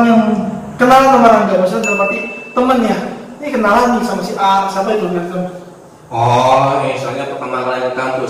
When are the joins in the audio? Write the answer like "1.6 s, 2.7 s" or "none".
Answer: none